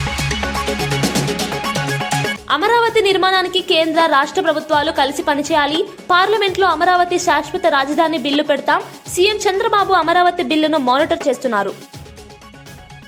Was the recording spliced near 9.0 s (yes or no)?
no